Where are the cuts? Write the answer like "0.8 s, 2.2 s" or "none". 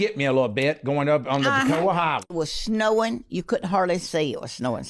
2.3 s